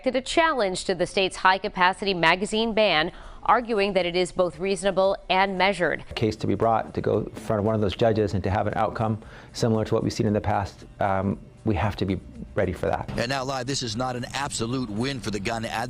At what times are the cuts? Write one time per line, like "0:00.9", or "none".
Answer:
0:06.1
0:13.0